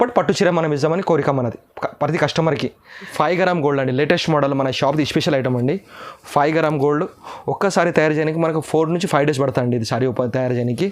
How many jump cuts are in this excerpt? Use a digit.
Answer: 1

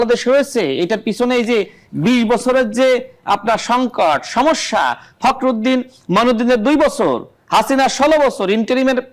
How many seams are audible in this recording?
0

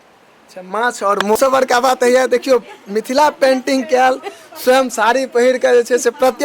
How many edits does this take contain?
1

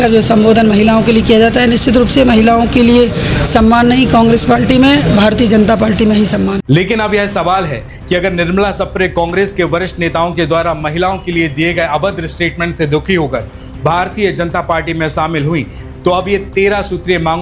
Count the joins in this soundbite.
1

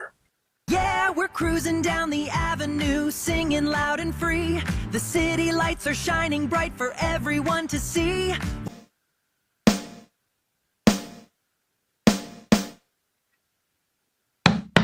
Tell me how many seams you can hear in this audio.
0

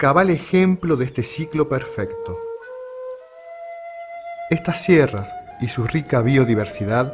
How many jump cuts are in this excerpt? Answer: 1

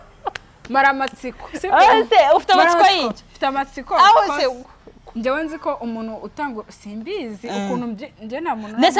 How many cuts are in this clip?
0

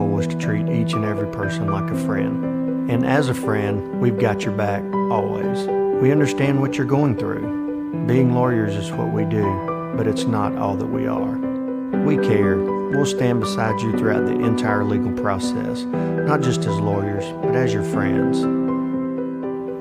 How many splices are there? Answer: 1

